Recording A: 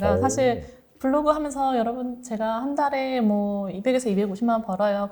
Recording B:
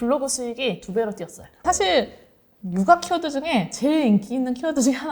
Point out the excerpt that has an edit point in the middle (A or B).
B